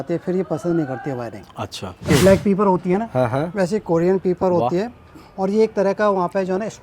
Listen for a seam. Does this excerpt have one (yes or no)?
yes